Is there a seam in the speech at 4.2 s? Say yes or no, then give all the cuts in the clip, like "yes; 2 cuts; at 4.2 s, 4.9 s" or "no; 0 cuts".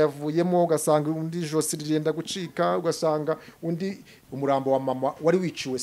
yes; 1 cut; at 4.2 s